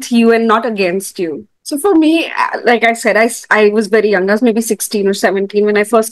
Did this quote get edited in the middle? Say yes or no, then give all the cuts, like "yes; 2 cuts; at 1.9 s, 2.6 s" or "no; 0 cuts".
yes; 1 cut; at 1.5 s